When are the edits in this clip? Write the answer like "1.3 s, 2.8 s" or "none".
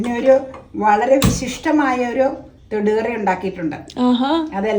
none